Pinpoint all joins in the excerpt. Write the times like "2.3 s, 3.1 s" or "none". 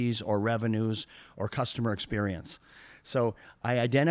none